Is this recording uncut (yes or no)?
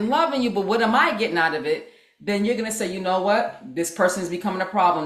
yes